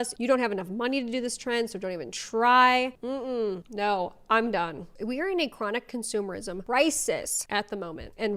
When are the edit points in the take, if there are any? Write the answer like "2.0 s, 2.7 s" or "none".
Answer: 4.8 s, 6.6 s, 7.4 s